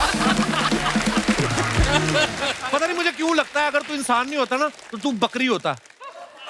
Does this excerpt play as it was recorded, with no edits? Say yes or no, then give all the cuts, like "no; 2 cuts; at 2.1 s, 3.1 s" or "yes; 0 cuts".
no; 1 cut; at 2.6 s